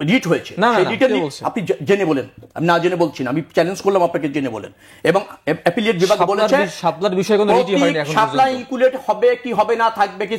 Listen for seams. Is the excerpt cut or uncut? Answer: uncut